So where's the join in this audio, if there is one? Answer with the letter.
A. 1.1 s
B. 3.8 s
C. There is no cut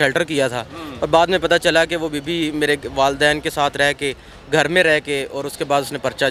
C